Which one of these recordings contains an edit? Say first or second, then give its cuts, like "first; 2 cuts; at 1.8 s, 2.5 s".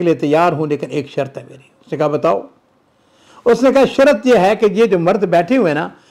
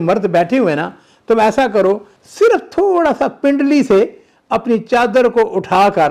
second; 1 cut; at 2.2 s